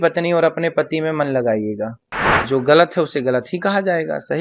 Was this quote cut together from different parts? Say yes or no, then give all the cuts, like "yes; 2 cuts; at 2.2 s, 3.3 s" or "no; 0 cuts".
yes; 1 cut; at 2.4 s